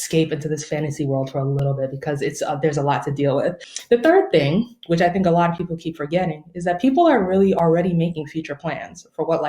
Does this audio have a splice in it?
yes; 1 cut; at 3.7 s

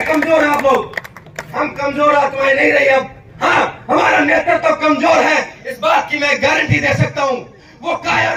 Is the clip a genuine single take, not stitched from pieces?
yes; 0 cuts

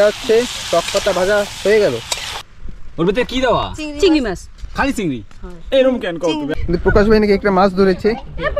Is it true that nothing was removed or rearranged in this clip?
no; 2 cuts; at 2.3 s, 6.5 s

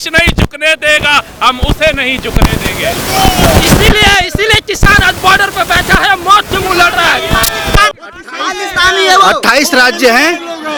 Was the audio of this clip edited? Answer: no; 0 cuts

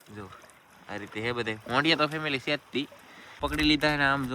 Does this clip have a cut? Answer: yes; 1 cut; at 3.4 s

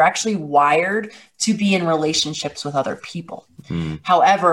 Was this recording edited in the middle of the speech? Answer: no; 0 cuts

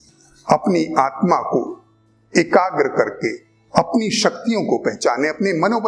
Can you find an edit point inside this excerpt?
no; 0 cuts

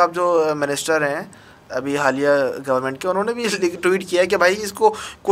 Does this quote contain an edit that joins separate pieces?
no; 0 cuts

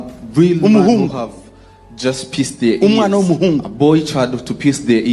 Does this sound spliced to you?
yes; 1 cut; at 2.7 s

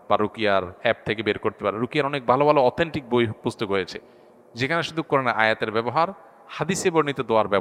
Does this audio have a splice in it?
no; 0 cuts

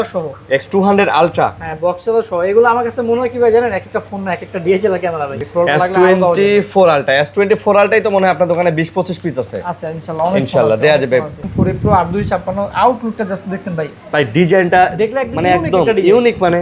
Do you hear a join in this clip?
yes; 2 cuts; at 5.3 s, 11.4 s

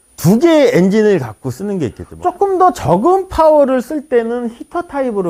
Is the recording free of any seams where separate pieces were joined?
no; 1 cut; at 2.1 s

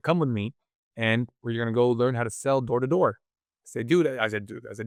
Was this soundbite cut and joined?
no; 0 cuts

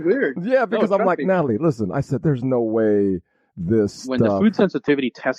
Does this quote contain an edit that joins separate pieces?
yes; 1 cut; at 4.4 s

